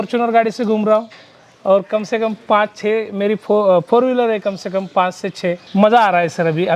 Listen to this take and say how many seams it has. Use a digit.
1